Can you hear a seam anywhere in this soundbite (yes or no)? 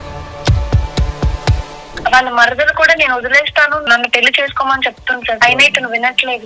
yes